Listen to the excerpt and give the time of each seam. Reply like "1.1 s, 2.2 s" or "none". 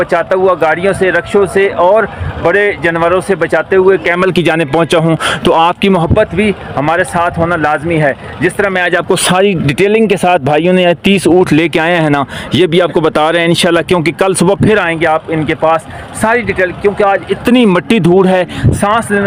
none